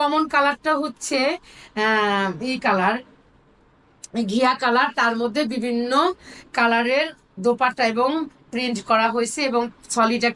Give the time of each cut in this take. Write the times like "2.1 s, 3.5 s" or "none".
none